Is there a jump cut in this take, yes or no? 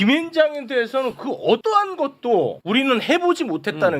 yes